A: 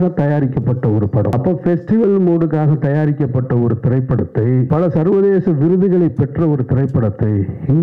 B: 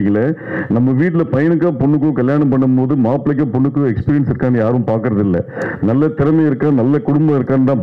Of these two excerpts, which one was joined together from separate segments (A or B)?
A